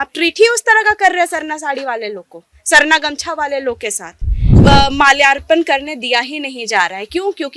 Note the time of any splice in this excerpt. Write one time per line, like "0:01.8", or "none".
0:04.5